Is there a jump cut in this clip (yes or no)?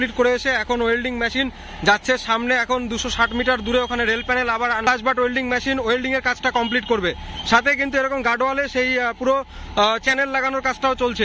no